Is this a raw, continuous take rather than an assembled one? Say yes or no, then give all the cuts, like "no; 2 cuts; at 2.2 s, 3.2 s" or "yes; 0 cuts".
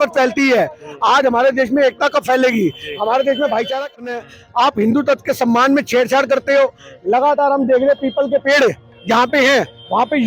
no; 1 cut; at 4.1 s